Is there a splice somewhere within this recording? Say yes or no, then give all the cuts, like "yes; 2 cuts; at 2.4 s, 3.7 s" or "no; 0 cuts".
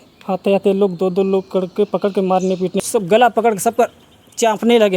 yes; 1 cut; at 2.8 s